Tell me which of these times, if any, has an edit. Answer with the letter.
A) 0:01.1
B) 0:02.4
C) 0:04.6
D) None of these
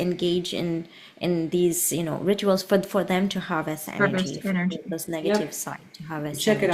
D